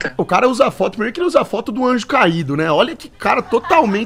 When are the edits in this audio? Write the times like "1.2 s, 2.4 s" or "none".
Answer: none